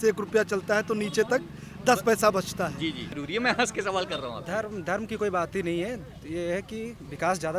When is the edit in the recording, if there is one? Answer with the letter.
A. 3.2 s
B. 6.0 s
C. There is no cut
A